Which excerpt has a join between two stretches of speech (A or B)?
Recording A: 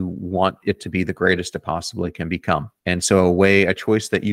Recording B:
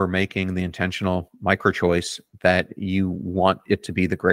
A